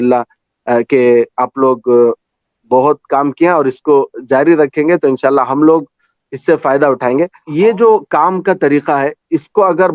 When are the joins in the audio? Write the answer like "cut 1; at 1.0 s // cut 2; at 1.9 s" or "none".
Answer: cut 1; at 7.4 s